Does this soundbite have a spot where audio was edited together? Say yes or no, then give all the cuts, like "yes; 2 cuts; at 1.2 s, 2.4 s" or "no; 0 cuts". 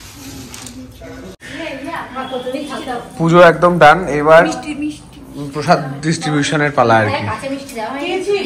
yes; 1 cut; at 1.4 s